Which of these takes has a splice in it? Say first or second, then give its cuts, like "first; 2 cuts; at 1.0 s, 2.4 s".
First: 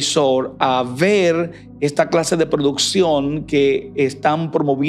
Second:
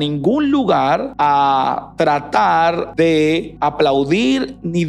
second; 3 cuts; at 1.1 s, 2.9 s, 3.5 s